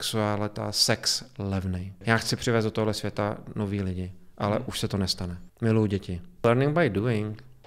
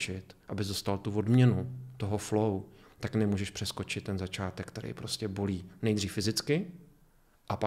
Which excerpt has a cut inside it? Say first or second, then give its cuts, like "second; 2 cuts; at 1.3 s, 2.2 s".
first; 3 cuts; at 1.9 s, 5.4 s, 6.4 s